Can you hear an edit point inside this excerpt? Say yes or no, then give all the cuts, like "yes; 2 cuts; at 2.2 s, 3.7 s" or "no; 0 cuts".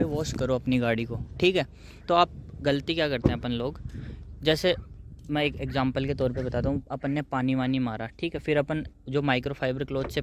no; 0 cuts